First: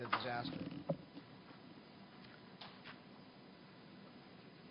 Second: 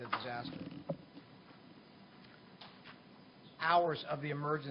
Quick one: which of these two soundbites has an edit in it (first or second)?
first